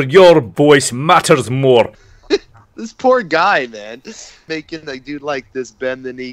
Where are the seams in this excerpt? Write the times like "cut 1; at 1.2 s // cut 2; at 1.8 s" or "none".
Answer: cut 1; at 2.1 s